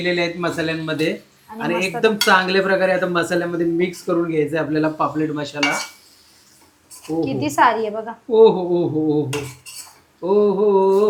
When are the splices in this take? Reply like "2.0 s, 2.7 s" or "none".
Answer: none